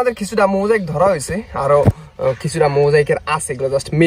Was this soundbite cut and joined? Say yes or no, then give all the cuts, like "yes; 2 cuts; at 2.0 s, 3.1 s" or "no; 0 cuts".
no; 0 cuts